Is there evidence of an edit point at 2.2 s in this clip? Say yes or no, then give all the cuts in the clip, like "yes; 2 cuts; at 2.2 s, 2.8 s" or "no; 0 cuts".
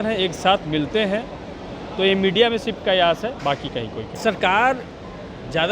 no; 1 cut; at 4.1 s